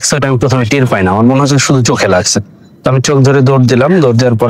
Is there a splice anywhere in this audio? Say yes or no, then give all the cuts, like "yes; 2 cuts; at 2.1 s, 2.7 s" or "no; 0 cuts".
no; 0 cuts